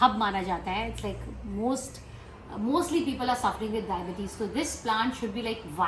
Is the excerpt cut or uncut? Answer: uncut